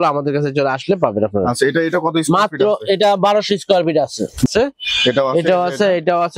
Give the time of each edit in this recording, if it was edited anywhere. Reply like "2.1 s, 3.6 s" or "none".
4.5 s

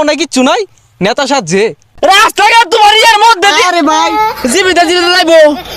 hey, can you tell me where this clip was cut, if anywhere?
1.8 s

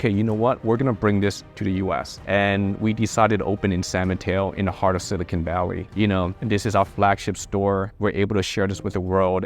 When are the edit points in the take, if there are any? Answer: 5.9 s

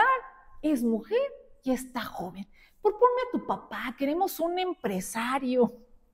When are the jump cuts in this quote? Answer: none

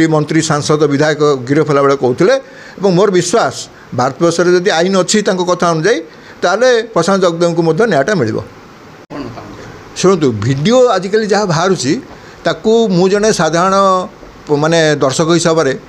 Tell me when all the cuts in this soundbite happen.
none

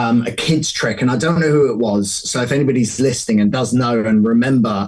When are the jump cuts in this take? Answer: none

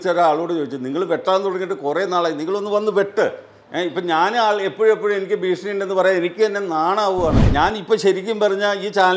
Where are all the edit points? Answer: 7.4 s

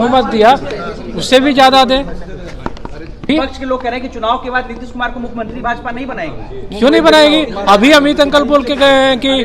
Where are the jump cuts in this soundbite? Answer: 3.3 s

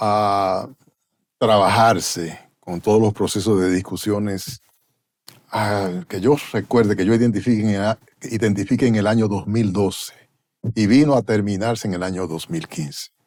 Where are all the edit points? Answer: none

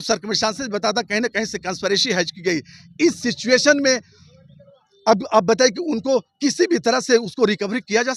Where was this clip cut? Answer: none

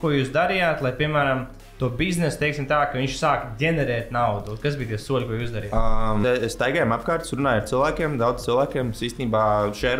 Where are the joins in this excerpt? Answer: 6.2 s

